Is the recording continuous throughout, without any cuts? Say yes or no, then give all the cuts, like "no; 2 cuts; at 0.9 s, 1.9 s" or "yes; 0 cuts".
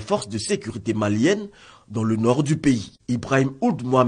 no; 1 cut; at 3.0 s